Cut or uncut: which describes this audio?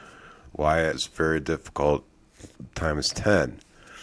cut